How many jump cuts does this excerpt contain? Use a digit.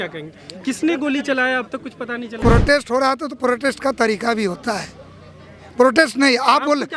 1